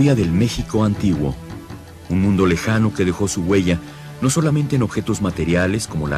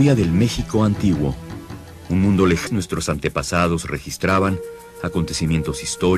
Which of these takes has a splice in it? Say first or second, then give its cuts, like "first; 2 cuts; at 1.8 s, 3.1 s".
first; 1 cut; at 2.7 s